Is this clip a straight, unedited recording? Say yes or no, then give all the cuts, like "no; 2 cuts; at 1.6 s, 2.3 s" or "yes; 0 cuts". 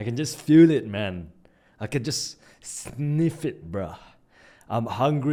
yes; 0 cuts